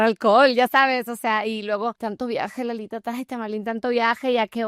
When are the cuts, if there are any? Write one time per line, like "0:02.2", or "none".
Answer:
0:02.0

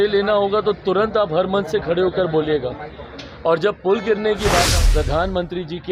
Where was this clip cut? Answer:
0:04.7

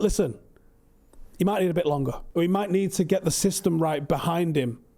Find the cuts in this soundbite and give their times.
0:02.2

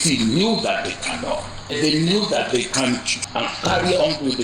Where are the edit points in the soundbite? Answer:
0:01.8
0:03.3

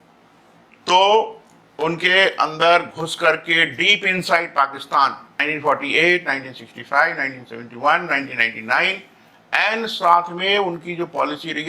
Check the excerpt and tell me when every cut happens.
0:05.3

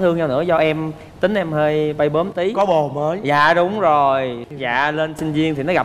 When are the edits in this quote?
0:04.4

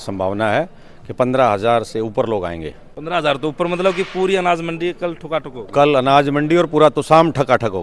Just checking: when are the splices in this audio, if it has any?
none

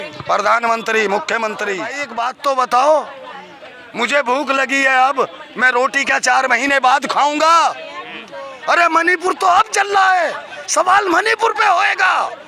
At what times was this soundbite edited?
0:02.0

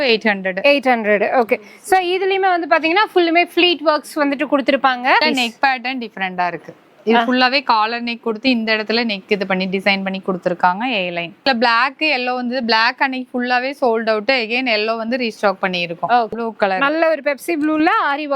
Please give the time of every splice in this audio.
0:05.2
0:11.4
0:16.3

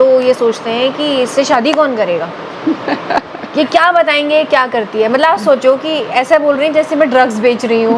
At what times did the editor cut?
none

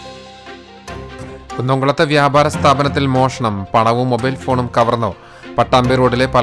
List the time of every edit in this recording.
0:01.2

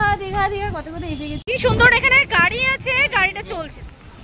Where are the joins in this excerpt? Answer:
0:01.4

